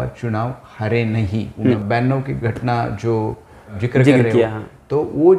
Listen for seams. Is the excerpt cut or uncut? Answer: cut